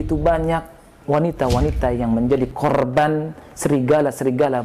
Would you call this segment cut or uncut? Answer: uncut